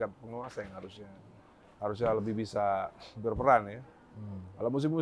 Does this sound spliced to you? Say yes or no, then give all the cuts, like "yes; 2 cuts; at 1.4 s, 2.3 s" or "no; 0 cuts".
no; 0 cuts